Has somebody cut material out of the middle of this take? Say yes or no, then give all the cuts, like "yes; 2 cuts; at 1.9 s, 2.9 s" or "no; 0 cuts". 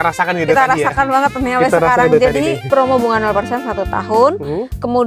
yes; 1 cut; at 2.7 s